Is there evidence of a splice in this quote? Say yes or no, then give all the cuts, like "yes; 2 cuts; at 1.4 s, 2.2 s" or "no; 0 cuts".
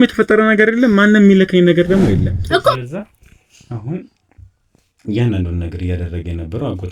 yes; 1 cut; at 2.8 s